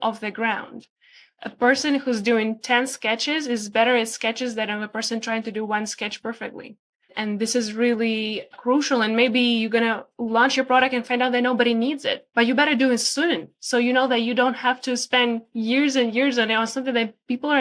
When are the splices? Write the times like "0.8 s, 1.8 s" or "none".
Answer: 7.1 s, 8.5 s